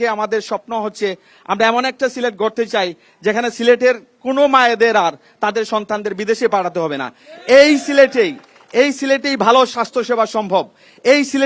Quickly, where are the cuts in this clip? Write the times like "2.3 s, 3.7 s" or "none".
none